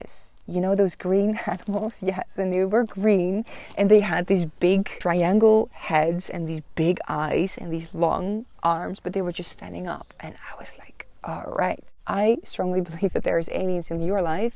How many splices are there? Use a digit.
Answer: 2